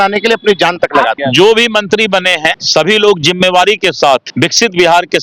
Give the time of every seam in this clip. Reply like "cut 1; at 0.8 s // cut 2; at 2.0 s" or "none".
cut 1; at 1.1 s // cut 2; at 2.6 s // cut 3; at 4.3 s